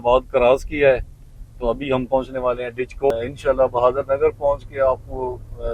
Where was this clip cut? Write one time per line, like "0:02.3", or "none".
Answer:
0:03.1